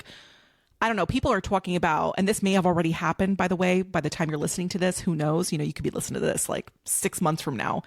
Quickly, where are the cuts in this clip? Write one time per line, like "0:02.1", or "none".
none

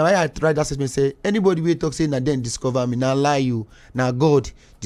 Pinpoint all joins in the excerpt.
none

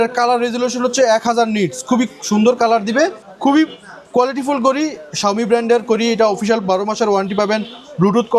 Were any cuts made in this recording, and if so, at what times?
0:03.2

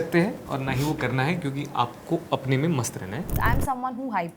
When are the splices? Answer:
0:03.3

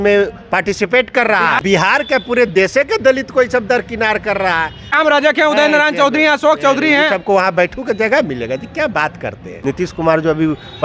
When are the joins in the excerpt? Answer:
0:01.6
0:04.9
0:09.5

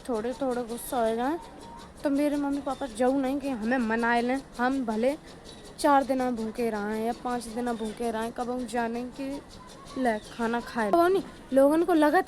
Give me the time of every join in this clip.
0:10.9

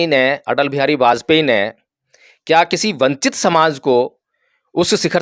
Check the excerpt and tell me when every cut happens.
none

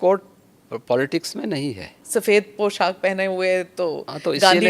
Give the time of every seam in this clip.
0:02.0

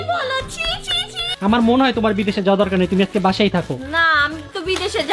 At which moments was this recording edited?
0:01.2

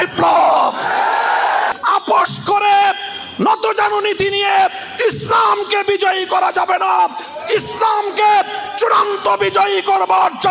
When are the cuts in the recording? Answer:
0:01.7

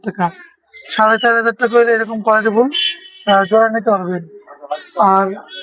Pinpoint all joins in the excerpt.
none

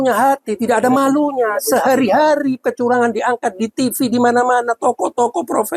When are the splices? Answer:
none

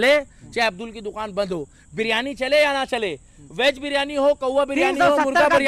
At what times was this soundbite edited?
none

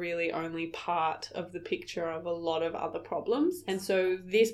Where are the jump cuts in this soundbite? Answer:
none

